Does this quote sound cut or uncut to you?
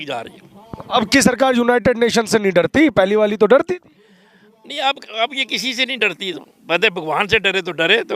uncut